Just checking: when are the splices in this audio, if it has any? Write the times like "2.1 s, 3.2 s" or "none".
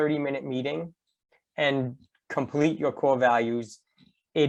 none